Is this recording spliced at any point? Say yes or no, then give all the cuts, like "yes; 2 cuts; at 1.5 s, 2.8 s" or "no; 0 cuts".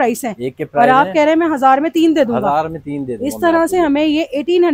no; 0 cuts